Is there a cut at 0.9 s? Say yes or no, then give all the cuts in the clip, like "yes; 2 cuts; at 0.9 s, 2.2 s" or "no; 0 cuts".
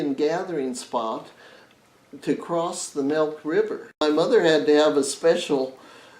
no; 1 cut; at 4.0 s